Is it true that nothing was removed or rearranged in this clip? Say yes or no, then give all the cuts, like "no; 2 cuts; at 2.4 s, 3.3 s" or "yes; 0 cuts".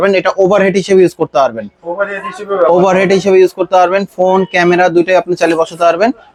yes; 0 cuts